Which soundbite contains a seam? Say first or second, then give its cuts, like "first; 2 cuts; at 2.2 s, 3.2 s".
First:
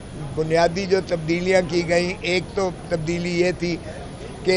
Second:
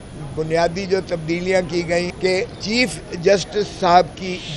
second; 1 cut; at 2.1 s